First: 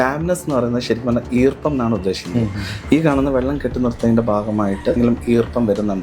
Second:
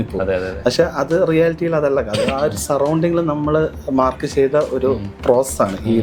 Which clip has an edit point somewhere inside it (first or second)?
first